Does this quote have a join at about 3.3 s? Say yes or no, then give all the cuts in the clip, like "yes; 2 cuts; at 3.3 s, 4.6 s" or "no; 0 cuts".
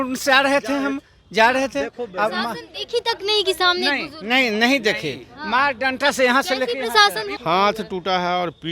no; 1 cut; at 7.3 s